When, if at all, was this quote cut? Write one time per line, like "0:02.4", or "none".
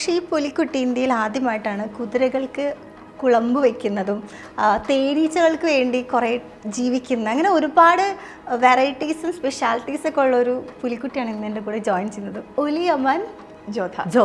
none